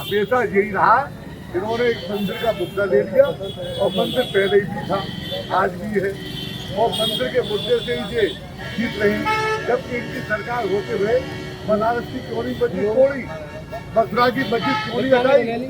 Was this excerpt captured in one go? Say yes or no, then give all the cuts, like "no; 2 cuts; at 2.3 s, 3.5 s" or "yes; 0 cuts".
yes; 0 cuts